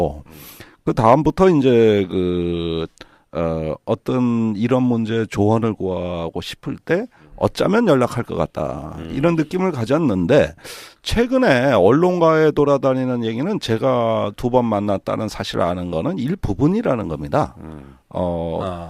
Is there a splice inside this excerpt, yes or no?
yes